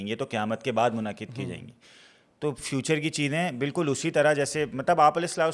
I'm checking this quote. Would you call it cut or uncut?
uncut